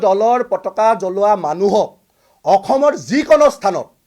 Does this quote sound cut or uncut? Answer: uncut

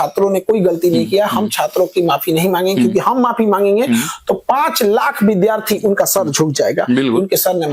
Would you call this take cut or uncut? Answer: uncut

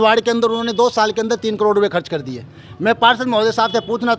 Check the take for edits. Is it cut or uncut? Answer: uncut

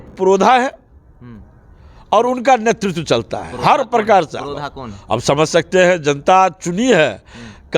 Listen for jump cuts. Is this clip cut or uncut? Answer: uncut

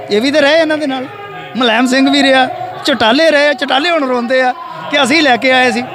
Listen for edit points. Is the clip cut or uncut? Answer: uncut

